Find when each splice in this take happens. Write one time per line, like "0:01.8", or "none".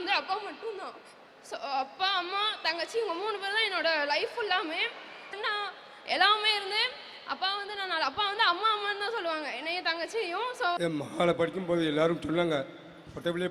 0:05.3
0:10.8